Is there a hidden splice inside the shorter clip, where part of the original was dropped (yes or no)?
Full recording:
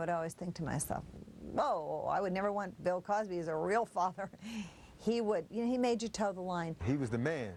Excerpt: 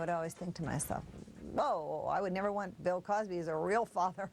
no